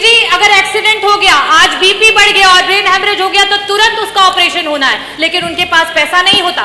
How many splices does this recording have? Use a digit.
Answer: 0